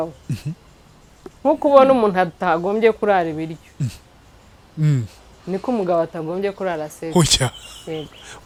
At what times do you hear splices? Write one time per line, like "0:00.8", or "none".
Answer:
none